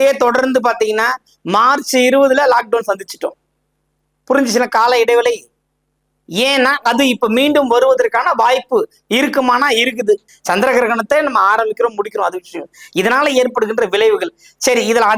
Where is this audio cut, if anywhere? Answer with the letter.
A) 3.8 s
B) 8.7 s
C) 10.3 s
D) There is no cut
C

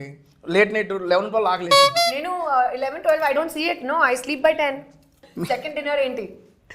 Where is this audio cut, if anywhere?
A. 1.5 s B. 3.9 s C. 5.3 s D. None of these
C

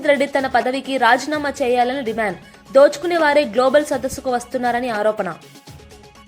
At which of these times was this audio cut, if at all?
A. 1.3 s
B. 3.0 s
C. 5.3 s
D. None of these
C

